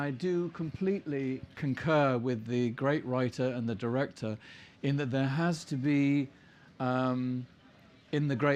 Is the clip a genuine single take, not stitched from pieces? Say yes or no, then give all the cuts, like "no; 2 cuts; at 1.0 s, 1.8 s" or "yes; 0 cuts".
yes; 0 cuts